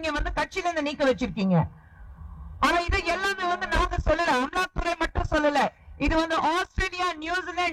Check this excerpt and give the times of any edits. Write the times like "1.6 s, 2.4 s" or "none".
none